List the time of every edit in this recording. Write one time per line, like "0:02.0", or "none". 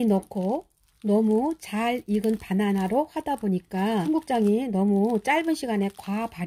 0:04.0